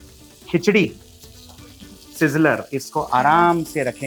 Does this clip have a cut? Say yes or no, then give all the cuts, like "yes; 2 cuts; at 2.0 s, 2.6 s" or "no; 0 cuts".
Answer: no; 0 cuts